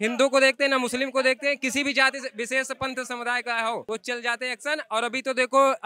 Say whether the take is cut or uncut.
cut